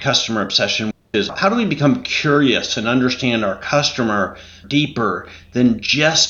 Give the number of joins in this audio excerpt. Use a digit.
2